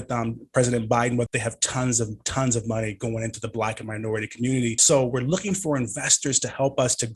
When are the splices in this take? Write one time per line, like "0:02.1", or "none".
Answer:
0:01.3
0:04.8